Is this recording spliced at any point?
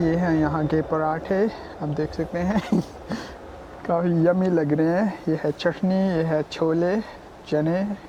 no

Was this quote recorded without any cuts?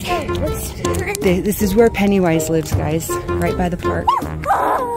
yes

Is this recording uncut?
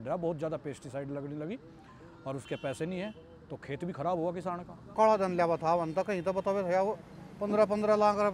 no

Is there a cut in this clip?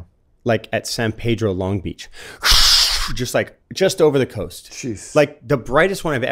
yes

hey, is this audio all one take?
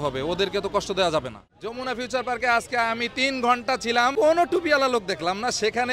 no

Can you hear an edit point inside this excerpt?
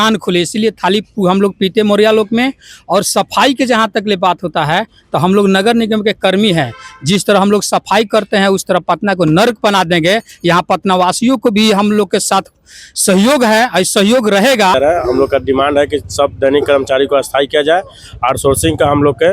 yes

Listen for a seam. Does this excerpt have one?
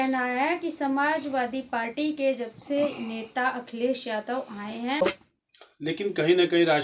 yes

